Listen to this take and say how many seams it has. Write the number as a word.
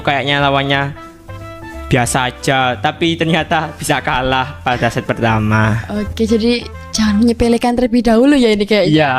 zero